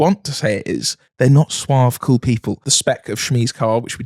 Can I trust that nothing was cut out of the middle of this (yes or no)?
no